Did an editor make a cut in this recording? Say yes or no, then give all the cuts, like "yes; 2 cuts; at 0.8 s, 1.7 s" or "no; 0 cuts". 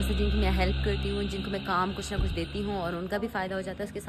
no; 0 cuts